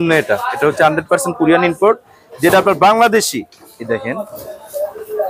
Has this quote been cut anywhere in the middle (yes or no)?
no